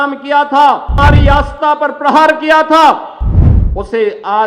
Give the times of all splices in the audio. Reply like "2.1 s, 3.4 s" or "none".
1.0 s